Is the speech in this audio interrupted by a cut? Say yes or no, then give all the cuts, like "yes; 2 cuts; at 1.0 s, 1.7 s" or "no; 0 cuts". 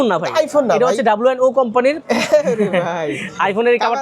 yes; 1 cut; at 2.0 s